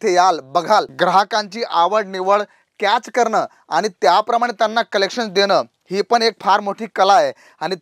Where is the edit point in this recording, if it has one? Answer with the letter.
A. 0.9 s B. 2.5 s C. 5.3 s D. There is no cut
A